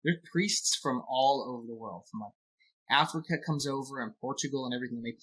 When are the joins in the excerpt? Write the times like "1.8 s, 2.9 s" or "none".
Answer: none